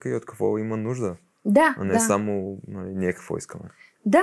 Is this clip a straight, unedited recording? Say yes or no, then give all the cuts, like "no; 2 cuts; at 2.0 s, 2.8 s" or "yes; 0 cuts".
yes; 0 cuts